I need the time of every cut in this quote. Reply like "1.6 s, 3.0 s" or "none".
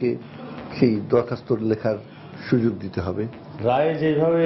3.4 s